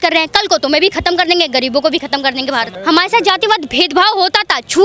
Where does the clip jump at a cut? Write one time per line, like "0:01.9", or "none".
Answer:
0:02.7

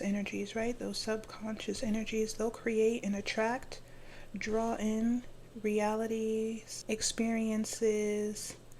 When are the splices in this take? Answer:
0:06.7

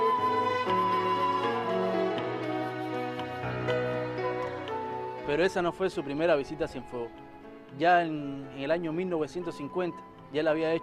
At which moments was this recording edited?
0:05.2

